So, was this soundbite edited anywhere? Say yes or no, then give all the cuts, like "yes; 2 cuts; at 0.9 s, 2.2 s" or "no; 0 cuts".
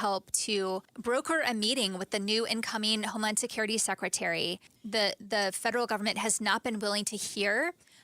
yes; 2 cuts; at 0.9 s, 4.8 s